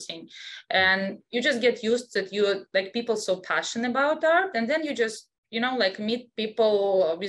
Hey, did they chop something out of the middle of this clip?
no; 0 cuts

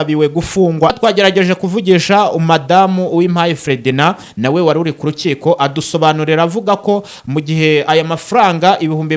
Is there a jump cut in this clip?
yes; 1 cut; at 0.9 s

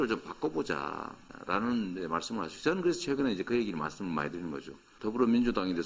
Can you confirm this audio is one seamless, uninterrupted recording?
yes; 0 cuts

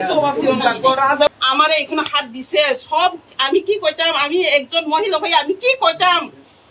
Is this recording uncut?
no; 1 cut; at 1.3 s

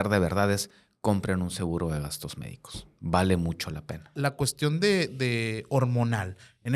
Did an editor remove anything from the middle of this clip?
yes; 1 cut; at 4.1 s

